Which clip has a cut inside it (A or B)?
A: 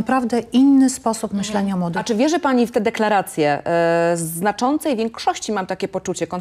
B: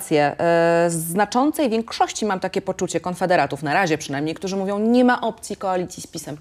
A